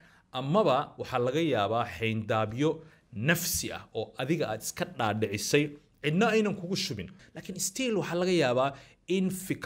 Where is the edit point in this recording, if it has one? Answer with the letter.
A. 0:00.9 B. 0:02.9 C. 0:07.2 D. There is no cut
C